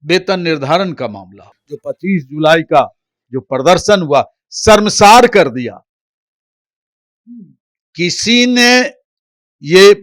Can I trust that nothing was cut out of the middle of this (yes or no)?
no